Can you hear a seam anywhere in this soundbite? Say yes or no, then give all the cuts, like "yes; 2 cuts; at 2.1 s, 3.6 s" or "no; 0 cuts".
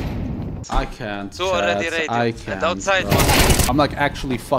yes; 1 cut; at 3.7 s